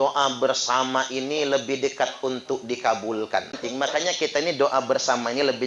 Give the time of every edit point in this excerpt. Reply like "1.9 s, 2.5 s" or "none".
3.6 s